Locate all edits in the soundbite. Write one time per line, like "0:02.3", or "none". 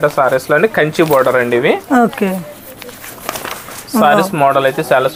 none